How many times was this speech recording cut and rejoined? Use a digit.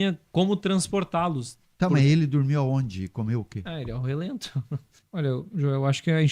1